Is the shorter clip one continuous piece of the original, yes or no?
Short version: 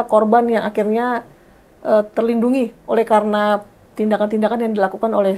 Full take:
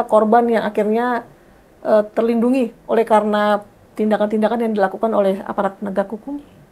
yes